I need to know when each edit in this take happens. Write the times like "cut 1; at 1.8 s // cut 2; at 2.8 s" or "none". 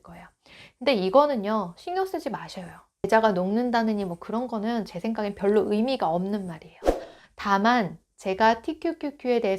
cut 1; at 6.9 s